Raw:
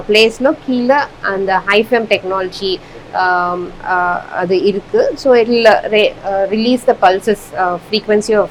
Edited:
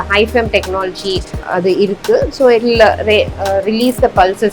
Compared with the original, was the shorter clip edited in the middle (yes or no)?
yes